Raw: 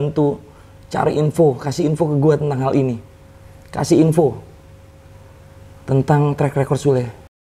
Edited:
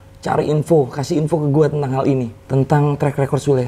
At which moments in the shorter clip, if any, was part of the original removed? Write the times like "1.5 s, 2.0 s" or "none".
2.4 s